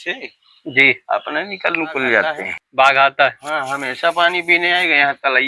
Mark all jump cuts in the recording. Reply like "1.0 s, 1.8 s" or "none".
2.7 s